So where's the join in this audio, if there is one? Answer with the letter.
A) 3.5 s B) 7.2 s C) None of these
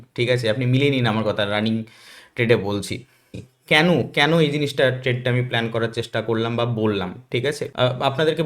A